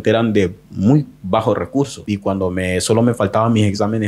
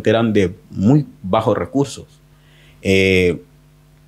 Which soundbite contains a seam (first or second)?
first